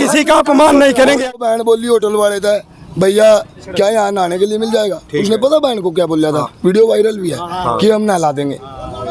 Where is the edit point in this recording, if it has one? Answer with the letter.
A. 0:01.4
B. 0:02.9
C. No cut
A